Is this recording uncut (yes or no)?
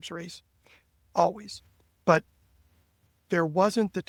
yes